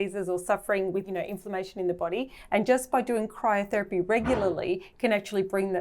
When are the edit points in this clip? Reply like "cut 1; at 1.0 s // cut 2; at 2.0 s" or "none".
cut 1; at 1.0 s